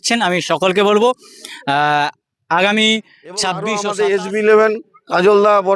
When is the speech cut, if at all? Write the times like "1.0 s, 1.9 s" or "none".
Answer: 3.8 s